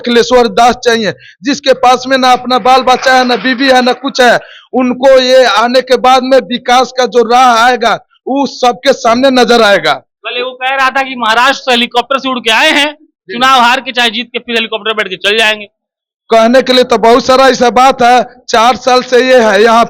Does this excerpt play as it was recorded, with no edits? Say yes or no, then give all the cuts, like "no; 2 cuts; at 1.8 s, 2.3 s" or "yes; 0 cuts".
yes; 0 cuts